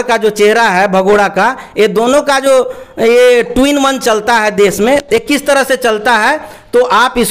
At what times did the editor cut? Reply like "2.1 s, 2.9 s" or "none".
none